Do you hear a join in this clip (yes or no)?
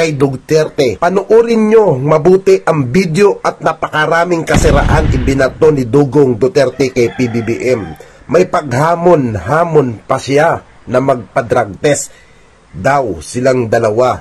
no